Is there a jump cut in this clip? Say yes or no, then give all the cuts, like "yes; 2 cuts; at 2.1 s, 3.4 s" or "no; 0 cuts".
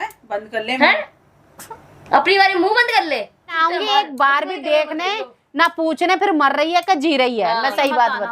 yes; 1 cut; at 3.6 s